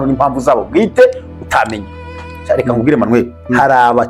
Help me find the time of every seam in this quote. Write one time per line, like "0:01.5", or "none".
0:02.1